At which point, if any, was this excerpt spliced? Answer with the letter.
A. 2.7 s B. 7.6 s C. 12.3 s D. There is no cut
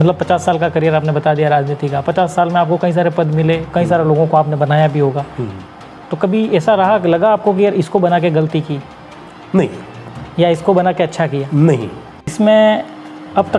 C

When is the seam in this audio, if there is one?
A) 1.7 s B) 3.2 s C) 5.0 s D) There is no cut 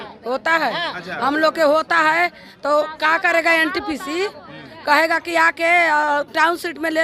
D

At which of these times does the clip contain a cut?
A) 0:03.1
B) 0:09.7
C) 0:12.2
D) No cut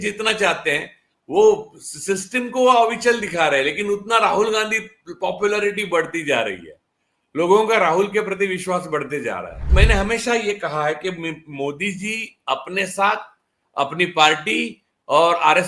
B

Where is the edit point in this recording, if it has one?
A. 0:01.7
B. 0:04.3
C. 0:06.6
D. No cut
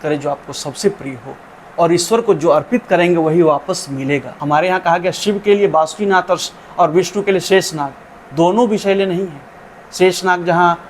B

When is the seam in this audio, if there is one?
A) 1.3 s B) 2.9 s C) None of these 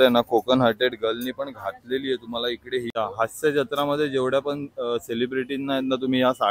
B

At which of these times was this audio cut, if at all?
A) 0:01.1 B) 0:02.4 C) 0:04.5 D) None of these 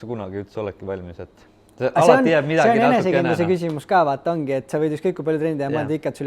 D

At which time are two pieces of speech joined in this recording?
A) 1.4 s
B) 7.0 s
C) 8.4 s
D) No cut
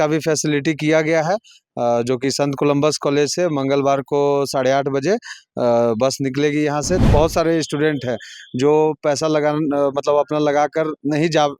B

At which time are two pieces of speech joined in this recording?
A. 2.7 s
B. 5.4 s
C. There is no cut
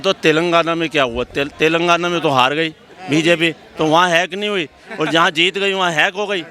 C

